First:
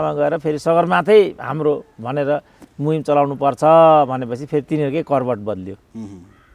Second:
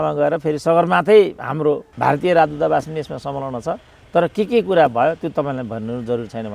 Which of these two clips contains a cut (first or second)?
second